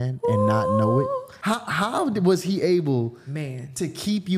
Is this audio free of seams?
no; 1 cut; at 1.3 s

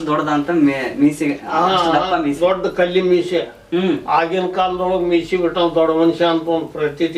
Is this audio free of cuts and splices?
yes; 0 cuts

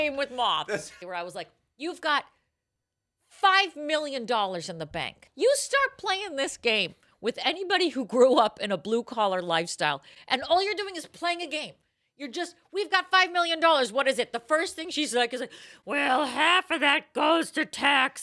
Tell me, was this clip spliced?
yes; 2 cuts; at 0.9 s, 5.2 s

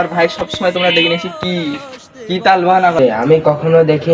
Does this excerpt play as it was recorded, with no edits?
no; 1 cut; at 3.0 s

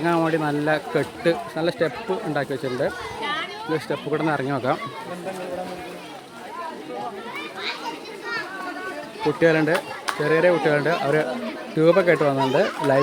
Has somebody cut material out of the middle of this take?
no; 0 cuts

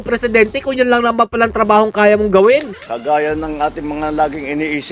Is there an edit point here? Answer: yes; 1 cut; at 2.9 s

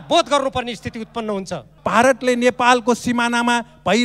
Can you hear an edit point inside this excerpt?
yes; 1 cut; at 1.7 s

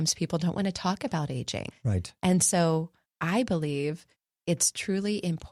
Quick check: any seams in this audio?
no; 0 cuts

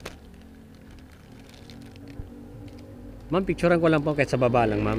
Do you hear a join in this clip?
no; 0 cuts

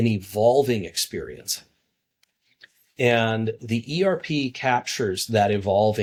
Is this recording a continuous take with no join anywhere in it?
yes; 0 cuts

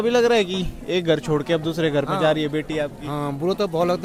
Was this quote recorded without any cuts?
yes; 0 cuts

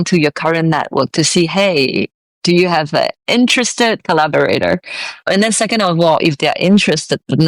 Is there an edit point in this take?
yes; 1 cut; at 4.0 s

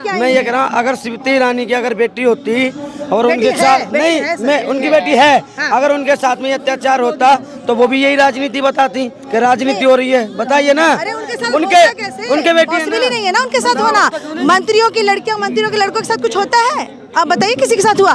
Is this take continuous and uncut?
yes; 0 cuts

